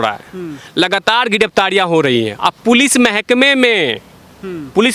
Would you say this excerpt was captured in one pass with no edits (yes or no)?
yes